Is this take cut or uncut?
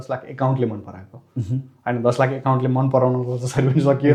uncut